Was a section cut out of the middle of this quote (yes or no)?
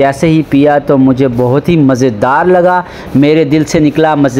no